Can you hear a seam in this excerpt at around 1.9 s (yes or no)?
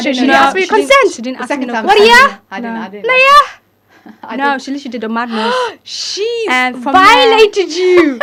no